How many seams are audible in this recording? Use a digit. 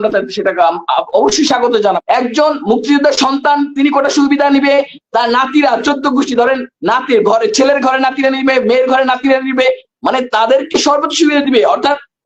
1